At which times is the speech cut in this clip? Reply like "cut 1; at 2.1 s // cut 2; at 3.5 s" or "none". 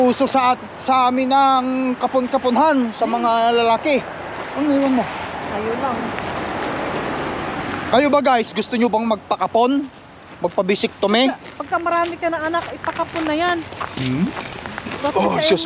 none